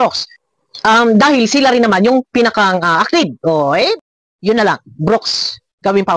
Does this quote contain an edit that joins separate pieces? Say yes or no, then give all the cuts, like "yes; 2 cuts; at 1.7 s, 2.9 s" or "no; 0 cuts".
no; 0 cuts